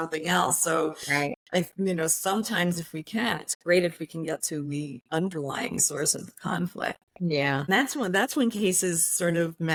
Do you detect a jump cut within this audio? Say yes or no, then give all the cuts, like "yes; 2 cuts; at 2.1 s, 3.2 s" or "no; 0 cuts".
no; 0 cuts